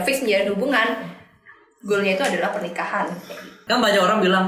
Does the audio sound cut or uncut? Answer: cut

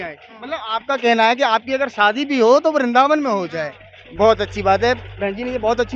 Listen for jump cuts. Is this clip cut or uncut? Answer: uncut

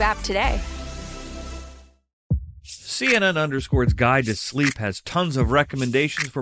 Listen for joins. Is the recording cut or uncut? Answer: cut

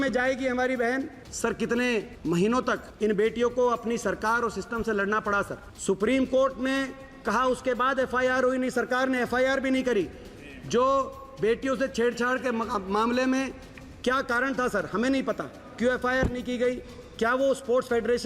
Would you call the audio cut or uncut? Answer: cut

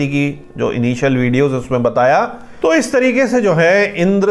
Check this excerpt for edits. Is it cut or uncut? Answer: cut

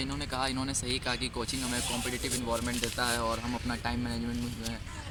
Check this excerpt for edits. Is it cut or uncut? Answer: uncut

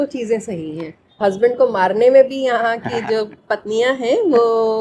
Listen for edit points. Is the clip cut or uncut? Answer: cut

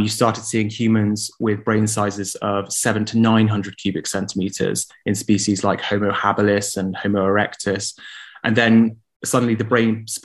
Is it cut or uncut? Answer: uncut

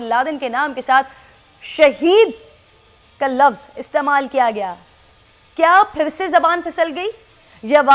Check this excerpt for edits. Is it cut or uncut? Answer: uncut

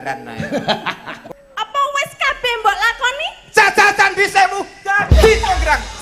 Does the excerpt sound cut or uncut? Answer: cut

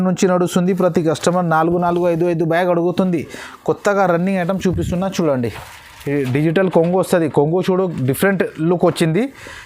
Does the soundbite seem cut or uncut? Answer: uncut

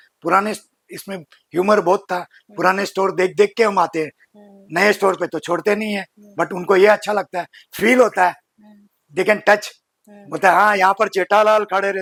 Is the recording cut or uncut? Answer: uncut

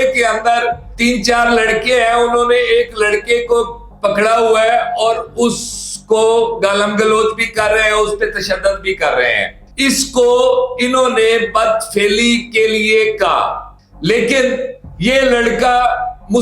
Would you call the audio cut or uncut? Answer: cut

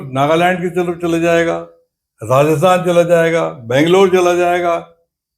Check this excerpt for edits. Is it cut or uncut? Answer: uncut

